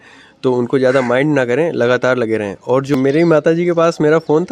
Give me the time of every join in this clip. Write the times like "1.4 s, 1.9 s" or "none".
2.9 s